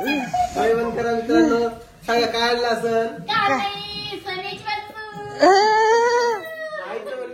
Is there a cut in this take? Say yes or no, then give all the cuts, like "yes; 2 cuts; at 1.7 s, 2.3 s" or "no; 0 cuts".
no; 0 cuts